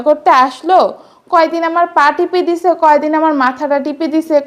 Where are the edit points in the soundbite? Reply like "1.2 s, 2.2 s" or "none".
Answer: none